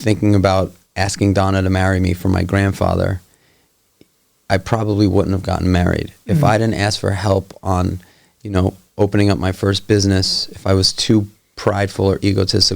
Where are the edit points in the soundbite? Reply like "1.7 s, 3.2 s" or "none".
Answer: none